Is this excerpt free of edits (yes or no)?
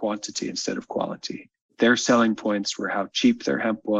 no